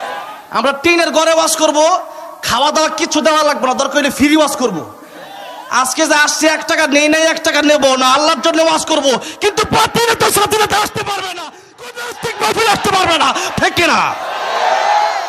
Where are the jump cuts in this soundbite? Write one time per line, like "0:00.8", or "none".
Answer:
0:13.5

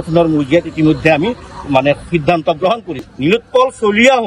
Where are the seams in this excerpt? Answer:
0:03.1

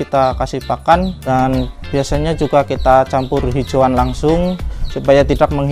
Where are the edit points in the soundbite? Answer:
0:01.2

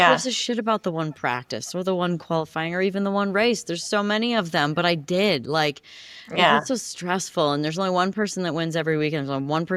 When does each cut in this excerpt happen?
none

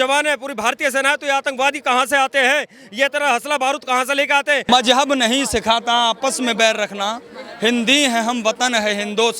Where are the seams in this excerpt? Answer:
0:04.7

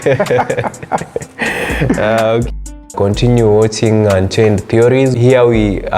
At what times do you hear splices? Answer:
0:02.8
0:05.1

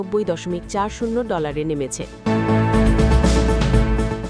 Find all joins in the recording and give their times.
0:02.1

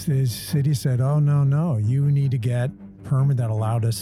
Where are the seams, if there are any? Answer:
0:02.8

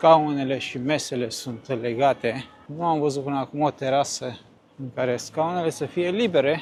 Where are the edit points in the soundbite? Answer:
none

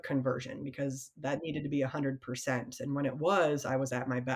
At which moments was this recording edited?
none

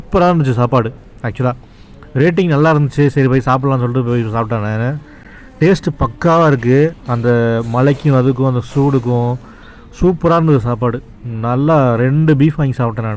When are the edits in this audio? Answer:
none

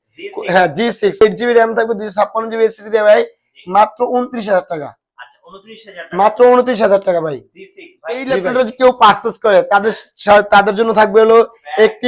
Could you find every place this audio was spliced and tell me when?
0:01.2
0:08.3

